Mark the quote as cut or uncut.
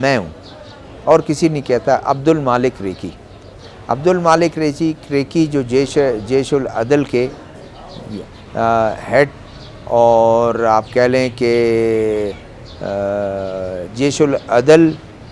uncut